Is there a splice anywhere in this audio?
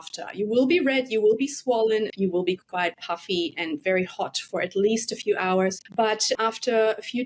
yes; 2 cuts; at 2.1 s, 6.1 s

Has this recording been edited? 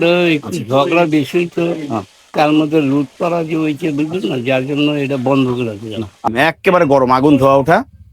yes; 1 cut; at 6.3 s

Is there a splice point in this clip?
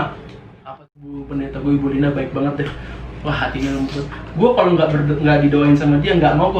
yes; 1 cut; at 1.2 s

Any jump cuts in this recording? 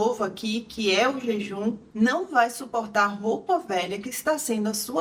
no; 0 cuts

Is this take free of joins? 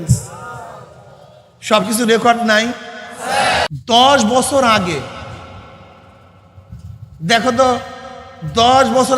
no; 1 cut; at 3.7 s

